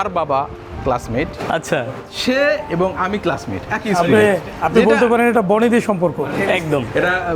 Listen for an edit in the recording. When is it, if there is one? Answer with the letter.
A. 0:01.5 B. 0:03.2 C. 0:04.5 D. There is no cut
C